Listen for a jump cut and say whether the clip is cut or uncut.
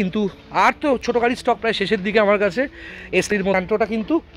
uncut